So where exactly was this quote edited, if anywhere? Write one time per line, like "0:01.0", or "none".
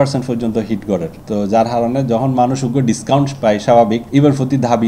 0:01.2
0:04.0